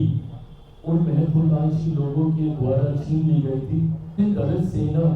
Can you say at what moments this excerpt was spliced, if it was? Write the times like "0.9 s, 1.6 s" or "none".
4.2 s